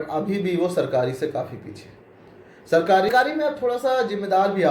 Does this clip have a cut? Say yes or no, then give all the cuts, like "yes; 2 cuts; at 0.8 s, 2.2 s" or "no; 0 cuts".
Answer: yes; 1 cut; at 3.1 s